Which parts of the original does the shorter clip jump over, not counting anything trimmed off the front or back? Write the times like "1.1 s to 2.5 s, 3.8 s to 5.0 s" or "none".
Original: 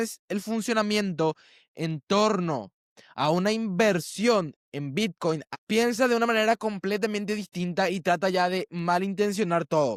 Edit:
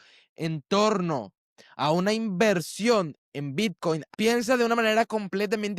5.5 s to 5.6 s